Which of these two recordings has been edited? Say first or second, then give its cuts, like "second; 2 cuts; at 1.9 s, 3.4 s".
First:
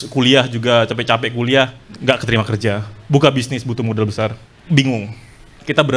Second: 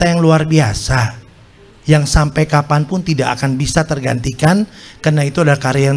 first; 2 cuts; at 1.9 s, 4.5 s